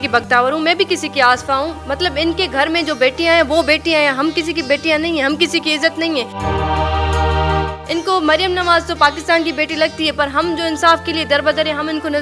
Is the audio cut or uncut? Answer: uncut